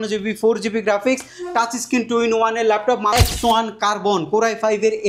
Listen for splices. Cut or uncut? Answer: cut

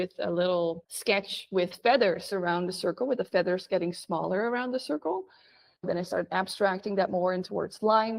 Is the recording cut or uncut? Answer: uncut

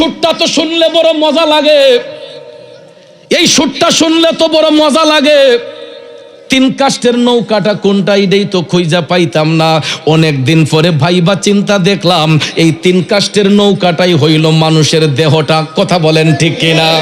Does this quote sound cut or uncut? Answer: uncut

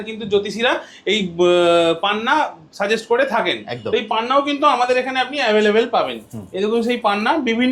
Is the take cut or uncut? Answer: uncut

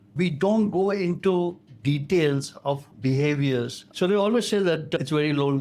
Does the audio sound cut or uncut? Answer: cut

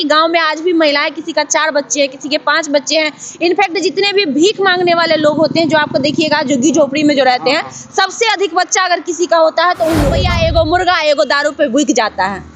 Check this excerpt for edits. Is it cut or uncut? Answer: cut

